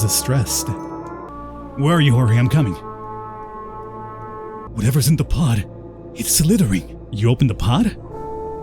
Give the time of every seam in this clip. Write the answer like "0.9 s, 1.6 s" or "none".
1.4 s, 4.6 s, 7.1 s